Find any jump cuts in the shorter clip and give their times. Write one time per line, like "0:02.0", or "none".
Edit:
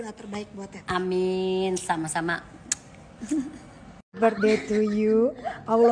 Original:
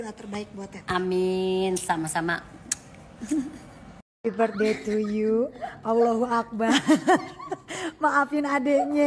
0:04.2